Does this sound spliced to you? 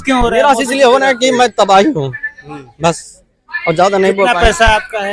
no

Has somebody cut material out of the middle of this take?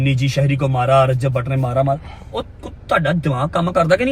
no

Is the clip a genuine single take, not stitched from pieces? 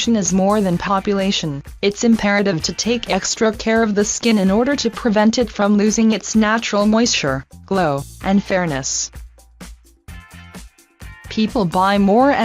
no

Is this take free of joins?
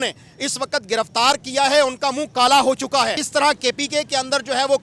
no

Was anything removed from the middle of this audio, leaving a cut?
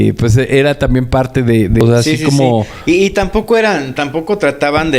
yes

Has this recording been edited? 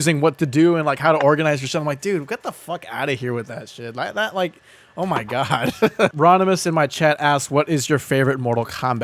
yes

